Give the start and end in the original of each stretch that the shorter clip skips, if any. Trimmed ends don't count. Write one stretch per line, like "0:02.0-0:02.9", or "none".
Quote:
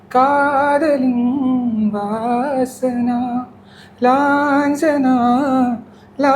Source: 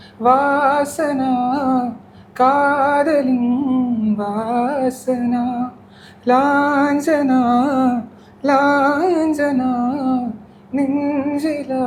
none